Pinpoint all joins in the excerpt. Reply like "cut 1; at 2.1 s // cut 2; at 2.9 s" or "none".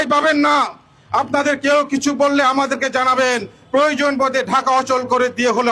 none